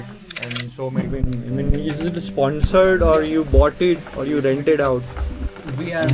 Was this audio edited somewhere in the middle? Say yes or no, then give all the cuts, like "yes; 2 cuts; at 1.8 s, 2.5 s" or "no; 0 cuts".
yes; 1 cut; at 1.0 s